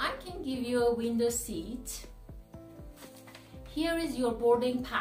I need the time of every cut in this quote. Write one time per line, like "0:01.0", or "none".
0:02.0
0:03.7